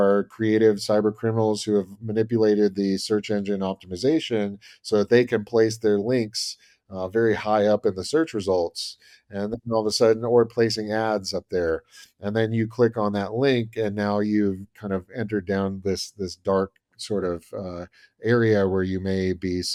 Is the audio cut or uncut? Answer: uncut